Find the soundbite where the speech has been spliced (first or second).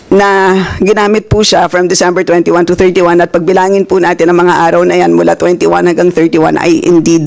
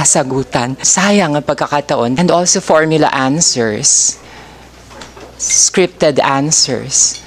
second